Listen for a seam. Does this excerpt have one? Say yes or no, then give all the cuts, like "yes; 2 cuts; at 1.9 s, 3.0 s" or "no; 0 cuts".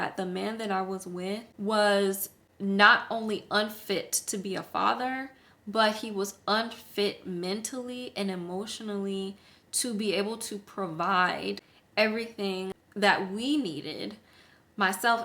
yes; 2 cuts; at 1.5 s, 12.8 s